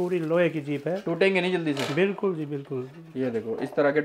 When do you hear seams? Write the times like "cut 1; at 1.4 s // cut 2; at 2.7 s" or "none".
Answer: none